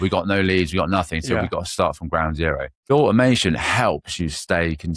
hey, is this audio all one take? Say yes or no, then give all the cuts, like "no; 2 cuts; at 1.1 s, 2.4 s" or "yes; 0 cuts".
no; 2 cuts; at 2.9 s, 4.0 s